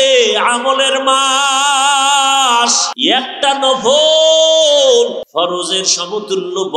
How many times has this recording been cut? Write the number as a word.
two